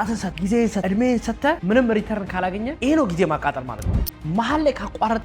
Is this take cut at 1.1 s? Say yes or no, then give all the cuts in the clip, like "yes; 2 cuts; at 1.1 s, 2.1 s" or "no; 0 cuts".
no; 2 cuts; at 2.7 s, 3.8 s